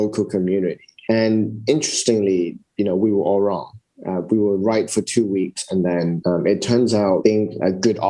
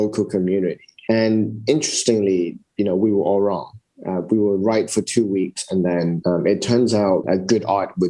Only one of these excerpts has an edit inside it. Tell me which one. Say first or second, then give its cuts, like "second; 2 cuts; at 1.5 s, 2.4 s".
second; 1 cut; at 7.2 s